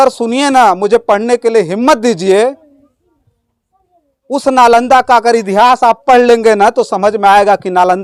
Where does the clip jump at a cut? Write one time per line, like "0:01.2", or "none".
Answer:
none